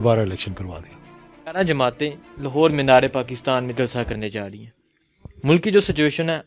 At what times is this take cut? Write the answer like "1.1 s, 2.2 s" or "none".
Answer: 1.5 s